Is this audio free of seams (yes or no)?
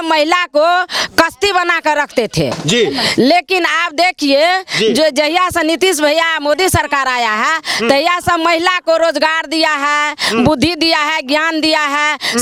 yes